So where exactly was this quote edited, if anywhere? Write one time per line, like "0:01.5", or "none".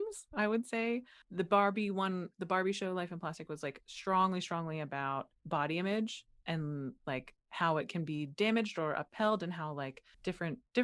0:01.2

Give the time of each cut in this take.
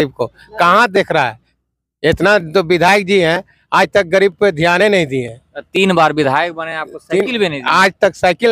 none

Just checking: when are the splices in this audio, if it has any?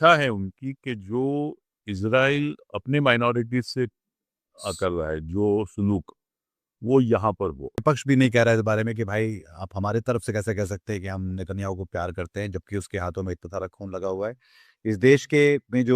0:07.8

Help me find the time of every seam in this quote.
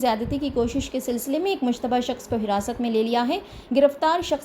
none

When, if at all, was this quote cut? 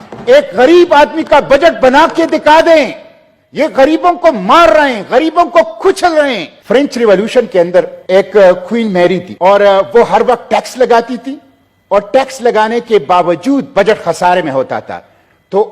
0:06.5
0:08.0
0:09.3

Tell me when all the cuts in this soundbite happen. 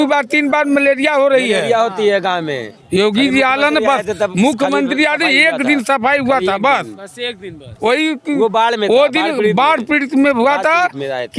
0:02.7

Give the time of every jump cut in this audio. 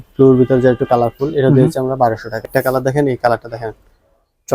0:02.5

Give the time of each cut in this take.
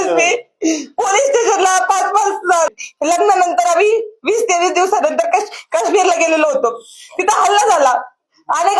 0:02.7

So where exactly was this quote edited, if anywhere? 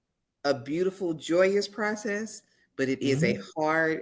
none

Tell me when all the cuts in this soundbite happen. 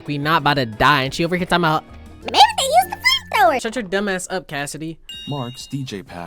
0:05.0

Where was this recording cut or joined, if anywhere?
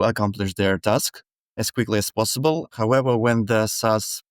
0:01.6
0:02.7

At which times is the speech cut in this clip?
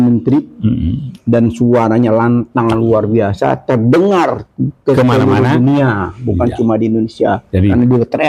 none

